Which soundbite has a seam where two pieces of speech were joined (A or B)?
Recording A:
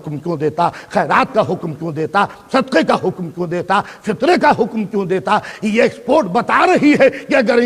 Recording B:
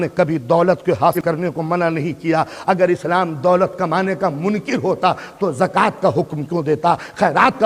B